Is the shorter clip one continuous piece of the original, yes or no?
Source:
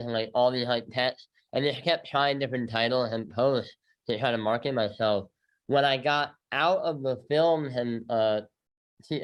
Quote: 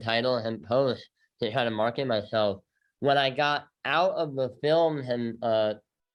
yes